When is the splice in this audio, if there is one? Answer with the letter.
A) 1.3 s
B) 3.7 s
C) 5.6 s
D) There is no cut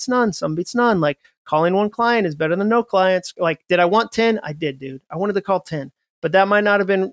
D